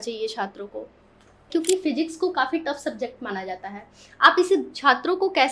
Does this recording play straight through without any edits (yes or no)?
no